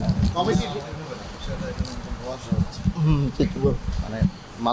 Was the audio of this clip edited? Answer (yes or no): no